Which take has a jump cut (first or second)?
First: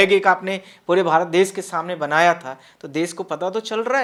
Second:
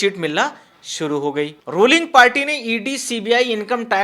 second